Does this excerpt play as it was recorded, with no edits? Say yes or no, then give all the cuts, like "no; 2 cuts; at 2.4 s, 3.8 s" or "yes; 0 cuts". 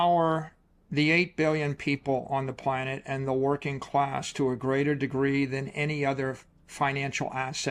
yes; 0 cuts